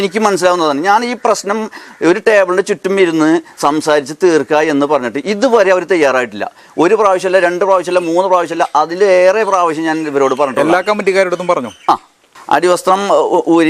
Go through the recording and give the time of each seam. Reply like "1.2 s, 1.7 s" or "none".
12.3 s